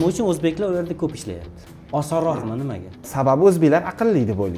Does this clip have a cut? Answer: yes; 1 cut; at 3.1 s

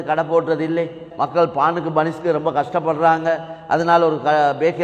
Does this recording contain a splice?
yes; 1 cut; at 1.0 s

